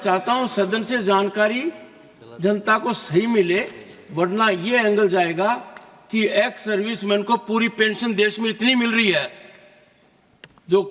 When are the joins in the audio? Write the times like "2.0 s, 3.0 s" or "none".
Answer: none